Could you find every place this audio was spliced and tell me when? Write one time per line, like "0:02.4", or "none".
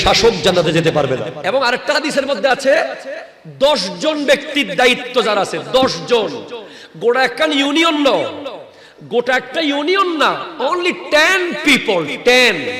0:01.3